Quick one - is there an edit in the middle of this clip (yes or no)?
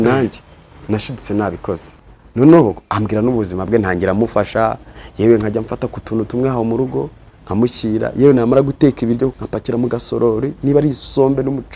yes